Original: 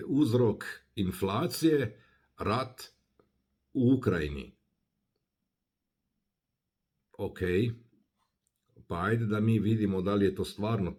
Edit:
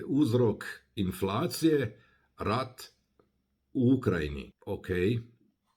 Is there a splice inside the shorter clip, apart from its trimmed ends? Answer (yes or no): yes